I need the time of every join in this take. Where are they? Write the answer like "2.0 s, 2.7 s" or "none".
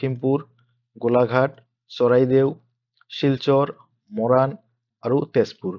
4.9 s